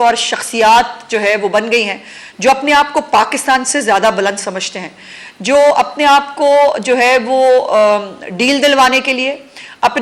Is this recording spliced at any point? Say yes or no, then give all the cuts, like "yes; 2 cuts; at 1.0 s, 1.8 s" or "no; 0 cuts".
no; 0 cuts